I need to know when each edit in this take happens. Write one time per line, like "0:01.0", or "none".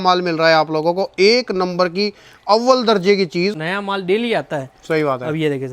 0:03.7